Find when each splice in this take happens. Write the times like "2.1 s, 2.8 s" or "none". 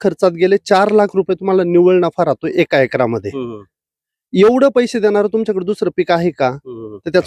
none